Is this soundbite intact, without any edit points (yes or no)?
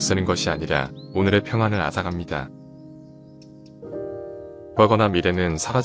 no